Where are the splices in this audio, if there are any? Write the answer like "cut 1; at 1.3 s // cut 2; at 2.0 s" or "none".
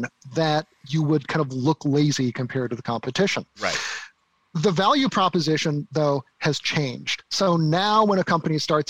none